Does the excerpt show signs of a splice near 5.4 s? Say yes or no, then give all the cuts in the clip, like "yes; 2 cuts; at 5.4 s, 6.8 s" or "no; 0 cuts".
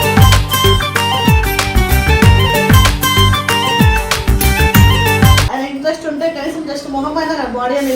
yes; 1 cut; at 5.4 s